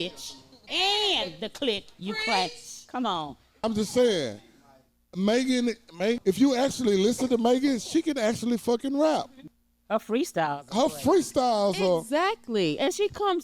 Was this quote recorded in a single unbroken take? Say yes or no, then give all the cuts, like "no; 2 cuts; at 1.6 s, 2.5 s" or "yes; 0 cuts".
no; 3 cuts; at 3.6 s, 6.2 s, 9.4 s